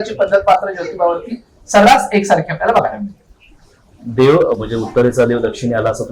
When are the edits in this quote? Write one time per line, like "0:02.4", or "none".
none